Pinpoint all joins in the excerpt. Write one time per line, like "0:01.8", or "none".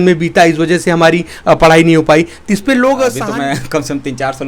0:03.2